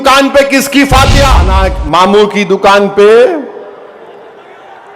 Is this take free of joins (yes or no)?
no